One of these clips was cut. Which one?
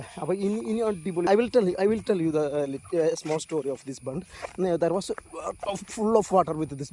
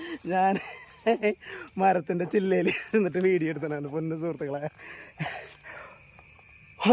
first; 1 cut; at 1.3 s

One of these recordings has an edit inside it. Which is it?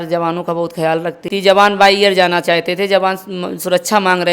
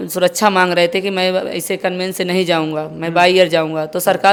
first; 1 cut; at 1.3 s

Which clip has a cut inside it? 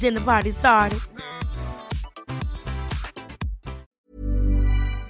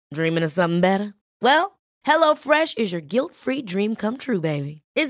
first; 1 cut; at 3.9 s

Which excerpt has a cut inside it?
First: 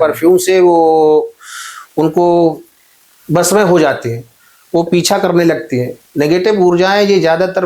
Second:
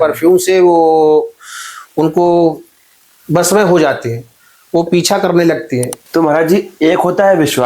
second; 1 cut; at 6.0 s

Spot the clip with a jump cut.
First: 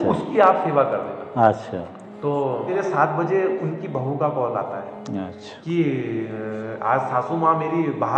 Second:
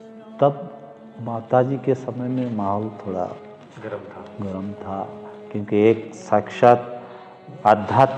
first; 1 cut; at 2.7 s

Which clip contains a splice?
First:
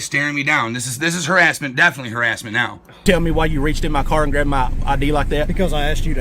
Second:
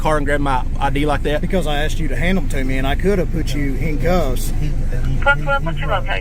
first; 1 cut; at 3.0 s

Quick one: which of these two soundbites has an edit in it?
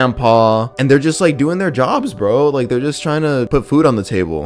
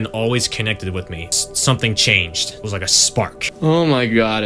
second; 2 cuts; at 1.3 s, 3.4 s

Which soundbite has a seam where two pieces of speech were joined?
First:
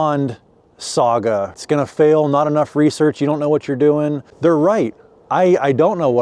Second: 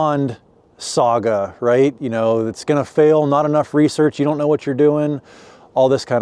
first; 2 cuts; at 1.6 s, 4.3 s

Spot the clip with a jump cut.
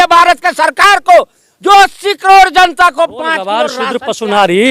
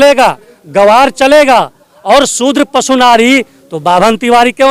first; 1 cut; at 3.7 s

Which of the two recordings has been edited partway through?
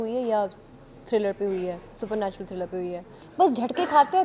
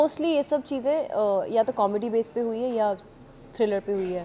first; 1 cut; at 3.2 s

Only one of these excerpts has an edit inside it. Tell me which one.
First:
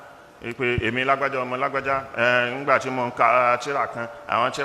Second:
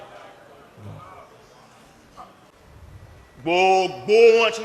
second; 1 cut; at 2.5 s

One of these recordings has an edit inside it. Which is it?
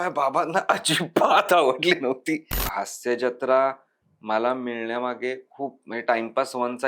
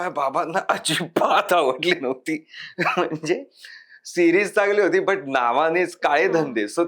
first; 1 cut; at 2.6 s

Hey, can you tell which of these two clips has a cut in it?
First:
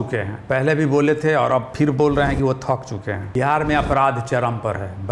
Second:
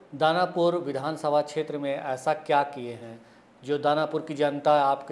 first; 1 cut; at 3.2 s

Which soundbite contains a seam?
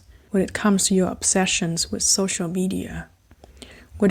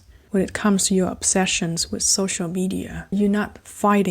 second; 1 cut; at 3.1 s

